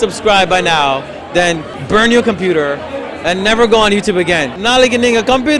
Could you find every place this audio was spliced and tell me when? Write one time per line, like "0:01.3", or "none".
0:01.7
0:04.6